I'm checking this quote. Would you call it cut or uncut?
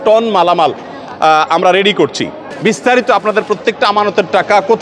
cut